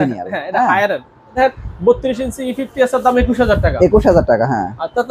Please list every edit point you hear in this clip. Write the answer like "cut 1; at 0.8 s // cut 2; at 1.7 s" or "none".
cut 1; at 1.4 s